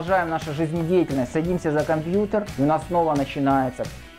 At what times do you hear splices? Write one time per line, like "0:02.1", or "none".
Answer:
0:02.5